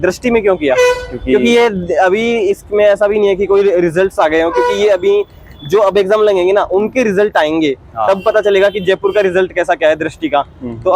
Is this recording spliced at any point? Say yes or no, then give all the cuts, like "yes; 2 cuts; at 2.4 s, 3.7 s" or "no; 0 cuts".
no; 0 cuts